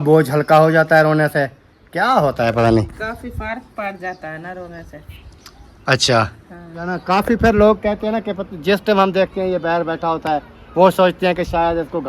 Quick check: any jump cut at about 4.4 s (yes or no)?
no